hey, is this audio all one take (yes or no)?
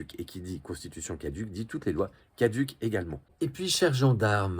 no